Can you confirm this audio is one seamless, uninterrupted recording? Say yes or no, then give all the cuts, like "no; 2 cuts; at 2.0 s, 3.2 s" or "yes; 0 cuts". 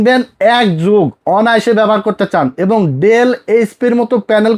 yes; 0 cuts